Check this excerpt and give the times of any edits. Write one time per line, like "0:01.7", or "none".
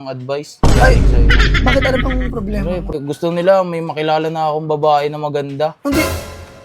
0:02.9